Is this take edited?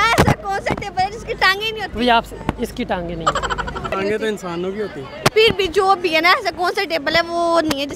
yes; 1 cut; at 3.9 s

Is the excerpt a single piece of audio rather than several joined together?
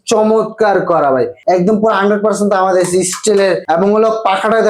no; 2 cuts; at 1.4 s, 3.6 s

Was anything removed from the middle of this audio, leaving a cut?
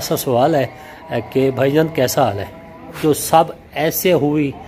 yes; 1 cut; at 3.0 s

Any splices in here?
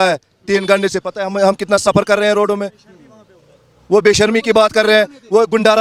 no; 0 cuts

